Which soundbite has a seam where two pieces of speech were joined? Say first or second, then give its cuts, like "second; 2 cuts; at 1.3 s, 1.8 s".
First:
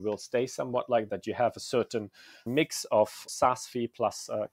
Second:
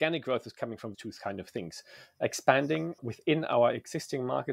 second; 1 cut; at 0.9 s